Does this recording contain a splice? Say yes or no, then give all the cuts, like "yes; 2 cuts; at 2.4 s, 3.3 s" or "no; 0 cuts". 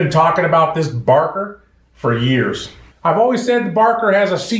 yes; 1 cut; at 2.8 s